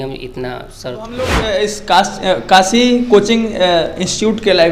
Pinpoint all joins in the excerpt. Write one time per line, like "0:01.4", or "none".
0:01.1

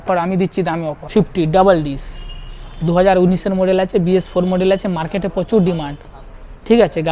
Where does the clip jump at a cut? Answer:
0:00.9

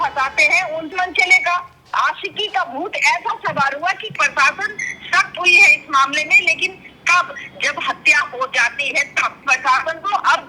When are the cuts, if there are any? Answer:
0:00.9
0:04.1
0:09.4

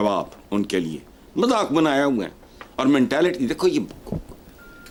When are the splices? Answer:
none

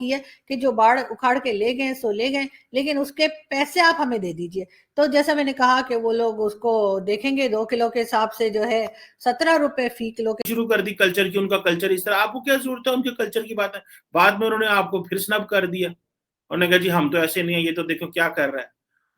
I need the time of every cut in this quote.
0:10.4

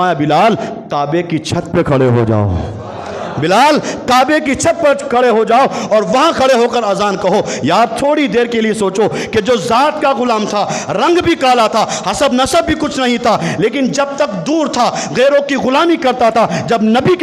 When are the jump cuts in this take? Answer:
none

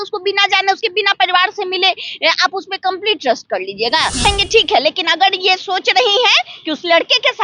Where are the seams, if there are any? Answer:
0:04.2

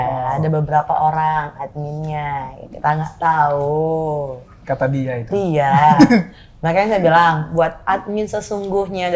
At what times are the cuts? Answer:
none

